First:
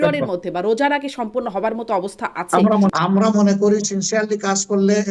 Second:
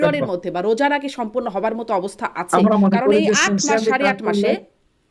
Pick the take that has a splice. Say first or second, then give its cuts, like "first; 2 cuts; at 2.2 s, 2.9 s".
first; 1 cut; at 2.9 s